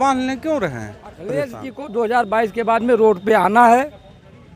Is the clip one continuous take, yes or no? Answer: no